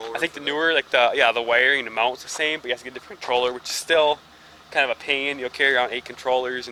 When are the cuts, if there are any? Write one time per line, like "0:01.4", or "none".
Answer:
none